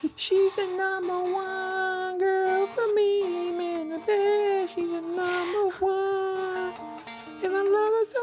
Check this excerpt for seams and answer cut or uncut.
uncut